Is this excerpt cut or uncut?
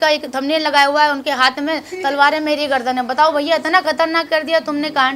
uncut